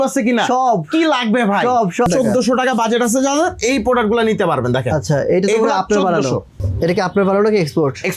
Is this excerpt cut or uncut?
cut